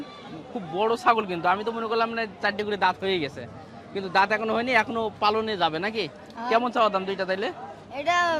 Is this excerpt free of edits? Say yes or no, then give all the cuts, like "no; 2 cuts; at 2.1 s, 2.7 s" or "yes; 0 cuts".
yes; 0 cuts